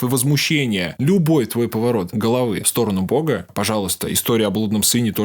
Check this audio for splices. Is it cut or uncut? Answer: cut